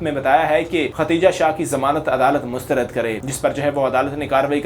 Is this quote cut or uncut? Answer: cut